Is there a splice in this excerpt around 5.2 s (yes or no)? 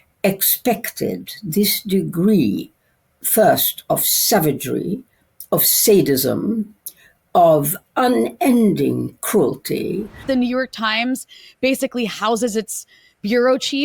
no